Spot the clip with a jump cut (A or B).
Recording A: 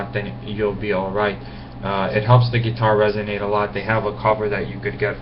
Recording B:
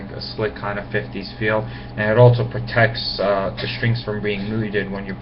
A